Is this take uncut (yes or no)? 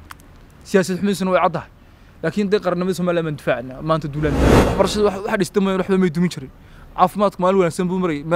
no